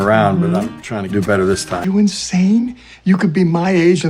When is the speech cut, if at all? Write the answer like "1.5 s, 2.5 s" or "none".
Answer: 1.8 s